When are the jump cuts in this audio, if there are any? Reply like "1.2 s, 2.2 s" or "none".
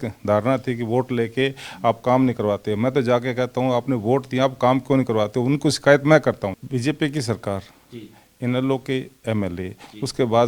6.6 s